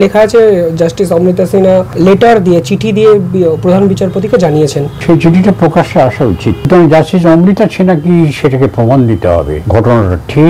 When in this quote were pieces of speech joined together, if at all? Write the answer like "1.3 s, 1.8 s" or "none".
1.9 s, 4.9 s, 6.6 s, 9.6 s